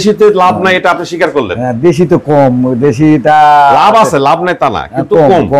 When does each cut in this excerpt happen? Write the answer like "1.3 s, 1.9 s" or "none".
none